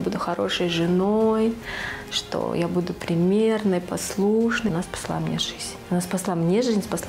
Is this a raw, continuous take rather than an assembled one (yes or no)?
no